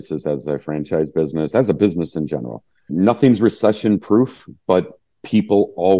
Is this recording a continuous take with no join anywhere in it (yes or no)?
no